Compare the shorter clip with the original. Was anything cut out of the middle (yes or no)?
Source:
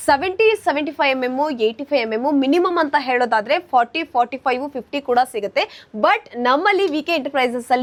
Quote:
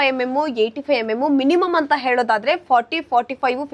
no